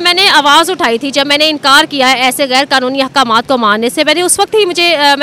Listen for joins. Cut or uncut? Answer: uncut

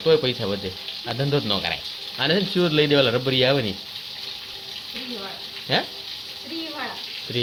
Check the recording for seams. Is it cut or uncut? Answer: uncut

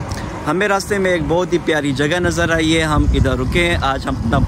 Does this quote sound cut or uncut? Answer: uncut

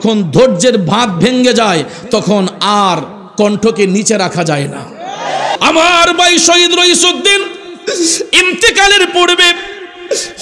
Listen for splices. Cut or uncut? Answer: cut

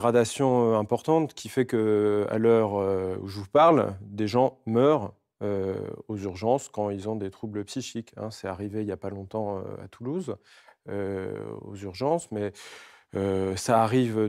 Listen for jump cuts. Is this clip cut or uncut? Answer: uncut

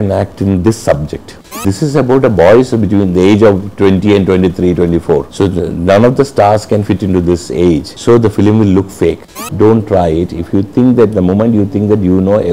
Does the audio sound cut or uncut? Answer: cut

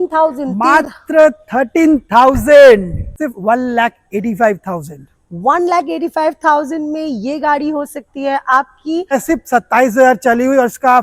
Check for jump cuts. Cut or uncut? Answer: cut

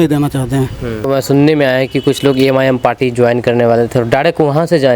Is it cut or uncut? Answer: cut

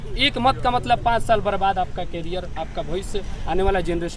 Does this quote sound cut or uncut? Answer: uncut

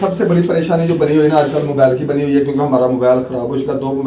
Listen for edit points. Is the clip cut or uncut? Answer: uncut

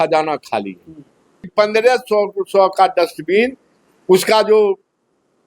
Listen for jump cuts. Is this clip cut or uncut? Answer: cut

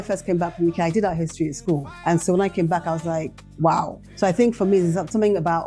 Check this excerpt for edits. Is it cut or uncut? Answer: cut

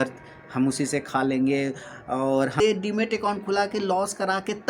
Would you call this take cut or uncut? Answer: cut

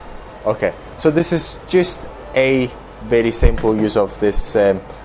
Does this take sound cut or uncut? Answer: uncut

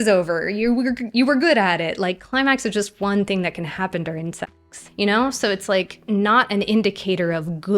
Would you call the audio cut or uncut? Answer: cut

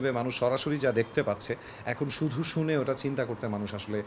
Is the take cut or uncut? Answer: uncut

